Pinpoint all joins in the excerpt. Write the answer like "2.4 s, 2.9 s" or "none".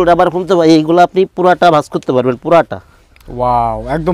none